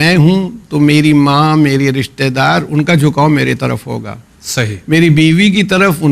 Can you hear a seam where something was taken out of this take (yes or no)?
no